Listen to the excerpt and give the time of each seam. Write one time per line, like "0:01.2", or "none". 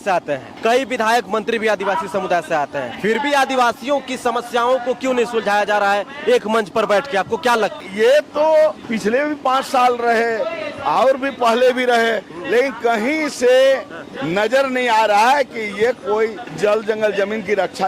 0:07.8
0:08.9
0:16.4